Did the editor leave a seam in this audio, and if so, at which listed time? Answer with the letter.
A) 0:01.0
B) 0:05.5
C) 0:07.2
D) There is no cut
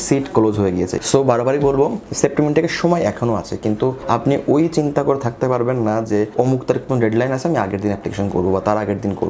A